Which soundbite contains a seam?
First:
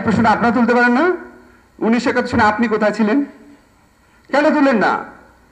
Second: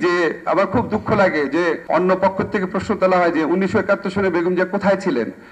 second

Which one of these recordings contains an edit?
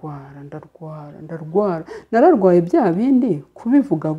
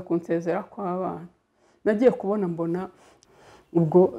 second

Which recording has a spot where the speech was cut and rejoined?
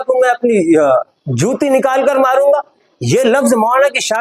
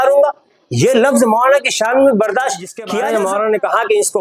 second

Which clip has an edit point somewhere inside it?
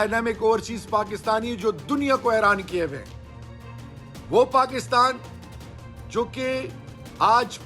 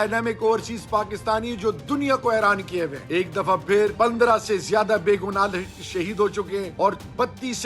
second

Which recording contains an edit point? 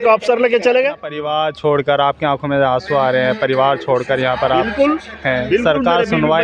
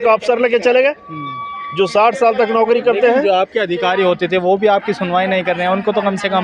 first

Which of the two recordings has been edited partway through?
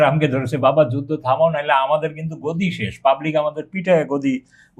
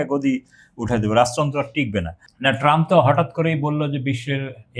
second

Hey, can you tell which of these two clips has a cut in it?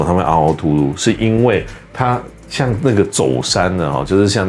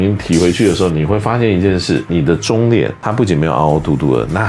second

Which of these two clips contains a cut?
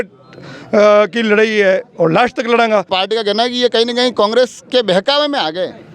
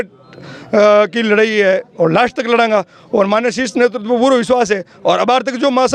first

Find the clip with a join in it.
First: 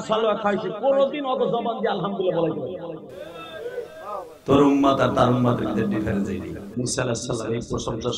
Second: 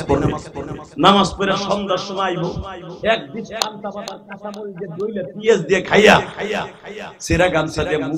first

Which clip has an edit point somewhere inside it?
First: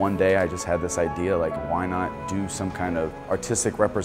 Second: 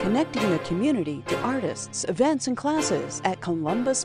first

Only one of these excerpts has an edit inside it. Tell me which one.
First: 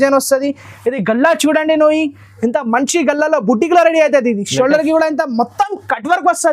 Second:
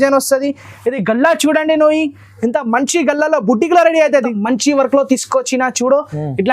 second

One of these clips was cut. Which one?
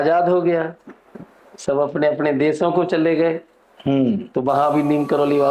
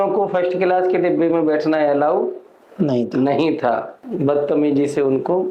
second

